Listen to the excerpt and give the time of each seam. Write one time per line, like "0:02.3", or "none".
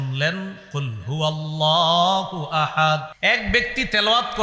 0:03.1